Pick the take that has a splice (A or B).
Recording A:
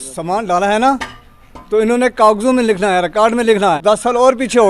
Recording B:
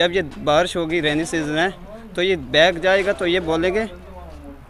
A